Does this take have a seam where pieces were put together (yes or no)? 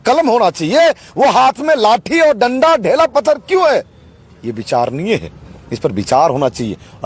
no